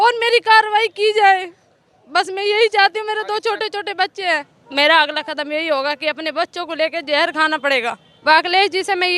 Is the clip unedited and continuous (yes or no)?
no